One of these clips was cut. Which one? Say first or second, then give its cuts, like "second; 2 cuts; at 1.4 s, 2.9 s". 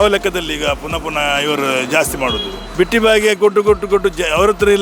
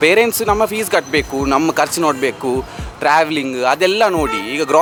first; 1 cut; at 2.6 s